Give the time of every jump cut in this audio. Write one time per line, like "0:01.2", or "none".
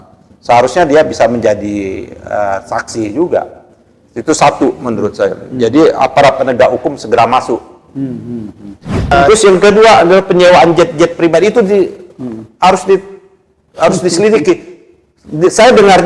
0:09.0